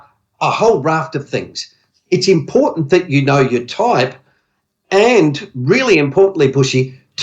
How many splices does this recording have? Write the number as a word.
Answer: one